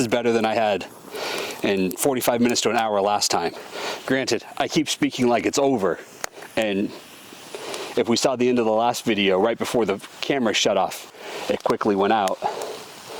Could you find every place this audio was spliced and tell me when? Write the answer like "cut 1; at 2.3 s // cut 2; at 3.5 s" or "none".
cut 1; at 3.6 s // cut 2; at 11.0 s